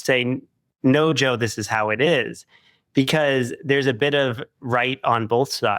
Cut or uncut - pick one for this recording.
uncut